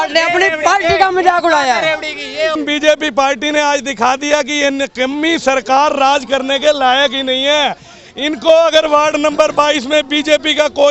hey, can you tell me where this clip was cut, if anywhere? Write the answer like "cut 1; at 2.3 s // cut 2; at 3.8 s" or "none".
cut 1; at 2.5 s